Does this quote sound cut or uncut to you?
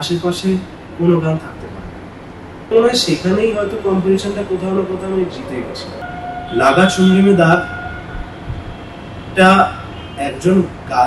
cut